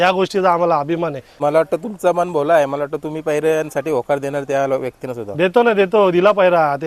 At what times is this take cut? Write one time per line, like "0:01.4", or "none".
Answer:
0:01.3